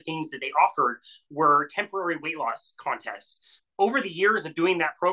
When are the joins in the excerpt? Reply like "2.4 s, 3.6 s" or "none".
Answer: 3.5 s